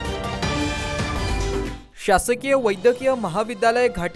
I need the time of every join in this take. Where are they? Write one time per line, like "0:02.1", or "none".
0:01.7